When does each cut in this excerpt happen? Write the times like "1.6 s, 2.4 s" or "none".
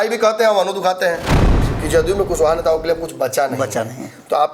1.7 s